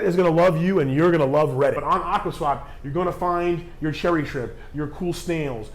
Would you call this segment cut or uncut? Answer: cut